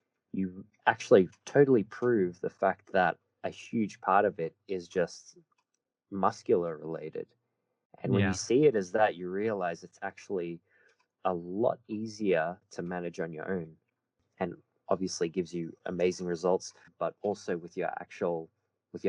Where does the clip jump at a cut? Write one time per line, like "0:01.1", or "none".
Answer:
0:14.2
0:16.9